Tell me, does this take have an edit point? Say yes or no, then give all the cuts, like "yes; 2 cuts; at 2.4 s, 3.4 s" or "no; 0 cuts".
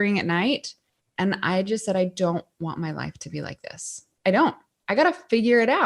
no; 0 cuts